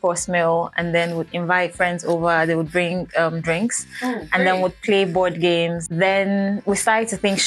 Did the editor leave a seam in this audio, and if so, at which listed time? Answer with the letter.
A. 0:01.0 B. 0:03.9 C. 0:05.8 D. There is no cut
C